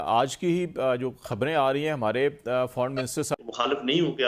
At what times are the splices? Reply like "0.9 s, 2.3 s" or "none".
3.3 s